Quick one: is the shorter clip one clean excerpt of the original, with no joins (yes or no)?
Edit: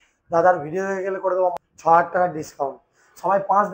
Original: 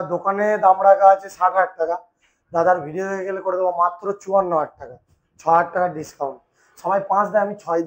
no